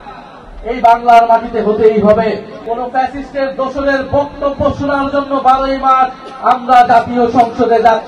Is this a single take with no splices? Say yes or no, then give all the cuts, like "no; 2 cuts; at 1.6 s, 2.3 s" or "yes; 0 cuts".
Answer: no; 1 cut; at 2.5 s